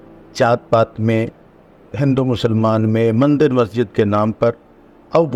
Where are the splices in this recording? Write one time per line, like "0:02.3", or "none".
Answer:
none